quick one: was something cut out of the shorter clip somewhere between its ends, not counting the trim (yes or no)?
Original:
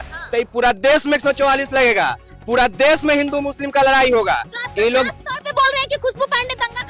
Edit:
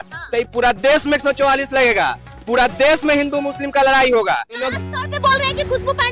yes